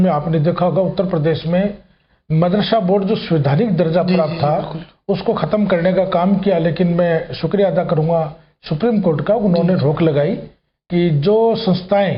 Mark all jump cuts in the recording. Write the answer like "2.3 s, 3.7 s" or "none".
none